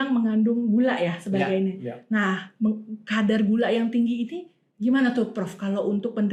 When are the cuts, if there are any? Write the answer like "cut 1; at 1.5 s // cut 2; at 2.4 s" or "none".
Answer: none